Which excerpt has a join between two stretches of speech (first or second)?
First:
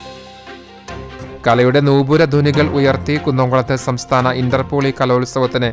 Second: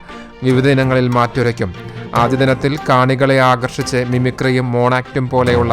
first